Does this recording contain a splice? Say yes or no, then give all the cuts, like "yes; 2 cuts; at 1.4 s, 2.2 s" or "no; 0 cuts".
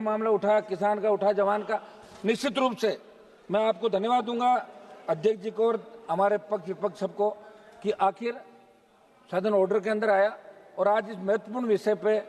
no; 0 cuts